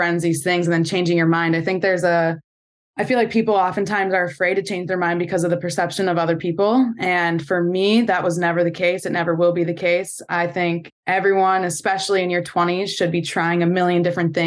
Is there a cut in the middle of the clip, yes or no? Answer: no